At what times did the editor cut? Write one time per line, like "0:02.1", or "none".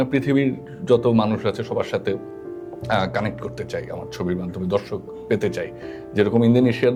none